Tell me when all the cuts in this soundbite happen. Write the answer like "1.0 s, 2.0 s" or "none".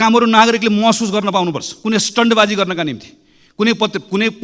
1.7 s